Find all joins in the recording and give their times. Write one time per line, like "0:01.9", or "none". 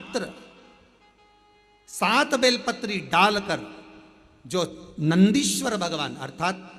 none